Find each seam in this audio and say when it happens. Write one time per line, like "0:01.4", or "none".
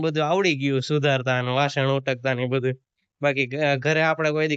none